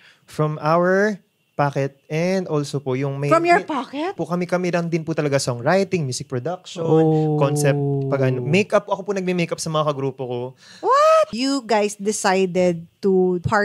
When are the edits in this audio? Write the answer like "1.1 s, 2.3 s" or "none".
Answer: 4.2 s, 11.3 s